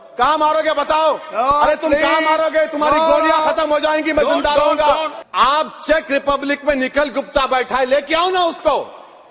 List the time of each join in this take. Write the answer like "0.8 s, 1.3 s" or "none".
5.2 s

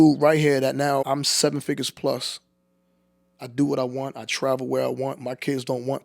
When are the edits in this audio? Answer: 1.1 s

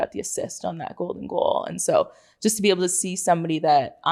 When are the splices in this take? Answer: none

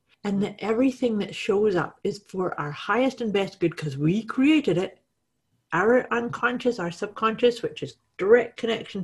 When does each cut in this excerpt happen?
none

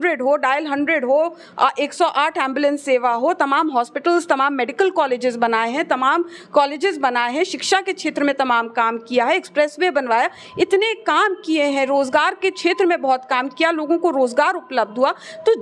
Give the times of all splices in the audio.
none

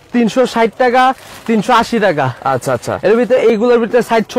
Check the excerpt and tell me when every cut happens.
none

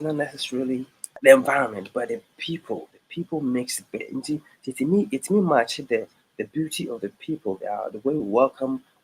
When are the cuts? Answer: 1.1 s

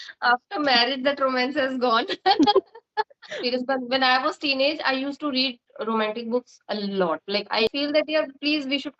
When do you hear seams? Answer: 3.4 s, 7.7 s

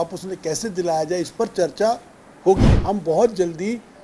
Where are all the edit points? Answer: 2.7 s

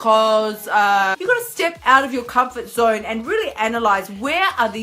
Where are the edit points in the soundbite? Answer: 1.1 s

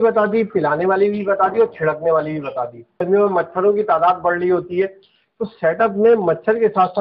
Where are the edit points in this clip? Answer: 3.0 s

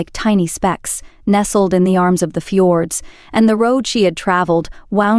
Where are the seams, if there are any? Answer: none

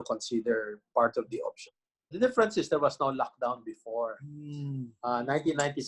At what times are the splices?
2.1 s

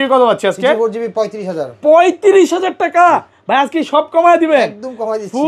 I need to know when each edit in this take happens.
none

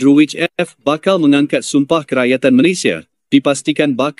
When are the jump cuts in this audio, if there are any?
none

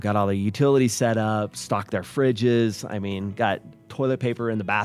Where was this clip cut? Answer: none

